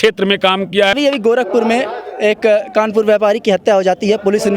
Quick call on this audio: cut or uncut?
cut